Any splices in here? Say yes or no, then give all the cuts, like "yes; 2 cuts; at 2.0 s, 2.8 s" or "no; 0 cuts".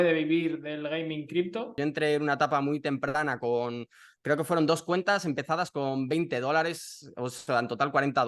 yes; 1 cut; at 1.7 s